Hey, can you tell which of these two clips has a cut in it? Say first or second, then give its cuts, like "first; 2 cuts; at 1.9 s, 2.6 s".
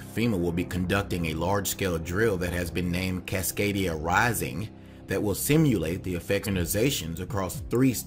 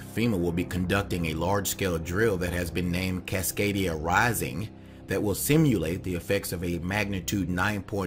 second; 1 cut; at 6.5 s